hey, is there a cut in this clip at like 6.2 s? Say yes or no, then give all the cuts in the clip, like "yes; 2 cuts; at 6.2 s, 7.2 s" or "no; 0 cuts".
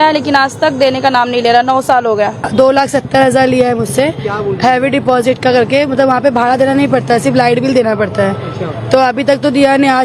no; 1 cut; at 2.5 s